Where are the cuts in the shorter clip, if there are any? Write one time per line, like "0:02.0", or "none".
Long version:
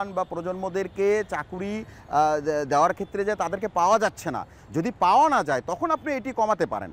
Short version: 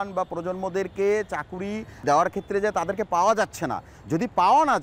0:02.0